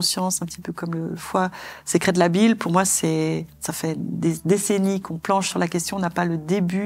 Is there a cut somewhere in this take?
yes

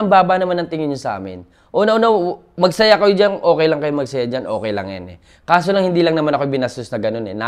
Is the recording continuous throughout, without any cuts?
yes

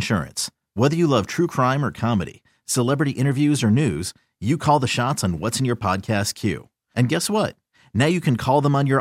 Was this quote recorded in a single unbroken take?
yes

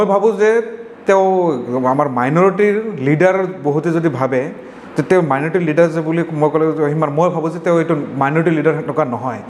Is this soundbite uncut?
yes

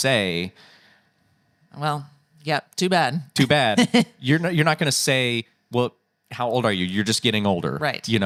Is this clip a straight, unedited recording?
yes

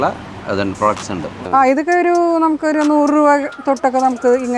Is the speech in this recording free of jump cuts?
no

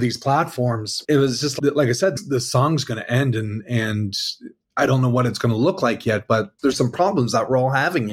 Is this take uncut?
no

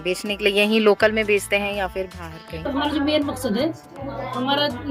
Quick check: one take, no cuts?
no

